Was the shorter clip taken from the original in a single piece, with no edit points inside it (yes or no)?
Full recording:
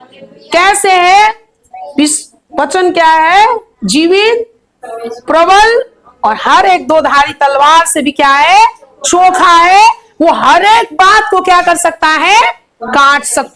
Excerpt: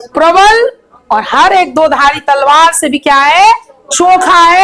yes